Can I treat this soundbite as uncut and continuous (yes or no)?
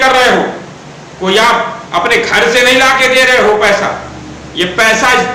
yes